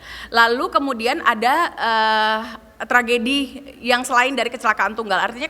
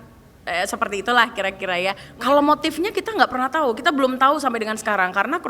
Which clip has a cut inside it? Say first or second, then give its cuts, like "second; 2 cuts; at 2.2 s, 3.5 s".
second; 1 cut; at 2.1 s